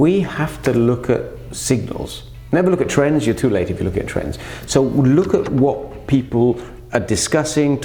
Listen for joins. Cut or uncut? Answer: uncut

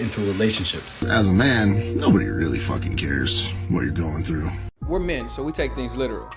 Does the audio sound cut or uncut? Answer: cut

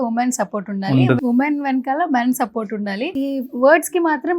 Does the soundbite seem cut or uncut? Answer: cut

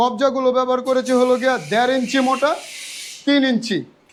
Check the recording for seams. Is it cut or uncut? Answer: uncut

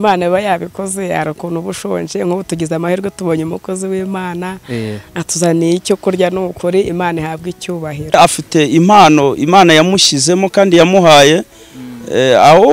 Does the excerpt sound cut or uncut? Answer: cut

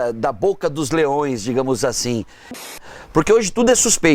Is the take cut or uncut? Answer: cut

